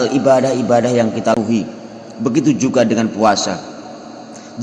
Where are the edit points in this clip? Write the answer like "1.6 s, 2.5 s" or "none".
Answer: 1.4 s